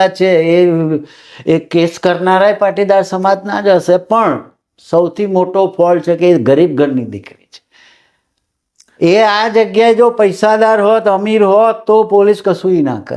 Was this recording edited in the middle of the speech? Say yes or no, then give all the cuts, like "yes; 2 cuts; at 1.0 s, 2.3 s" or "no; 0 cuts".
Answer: no; 0 cuts